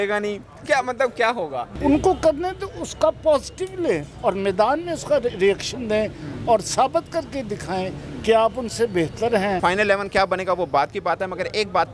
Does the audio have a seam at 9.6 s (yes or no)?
yes